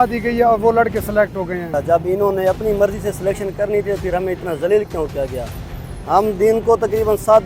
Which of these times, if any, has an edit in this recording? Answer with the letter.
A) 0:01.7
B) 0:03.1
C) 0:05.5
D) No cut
A